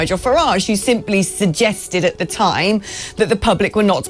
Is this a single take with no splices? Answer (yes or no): yes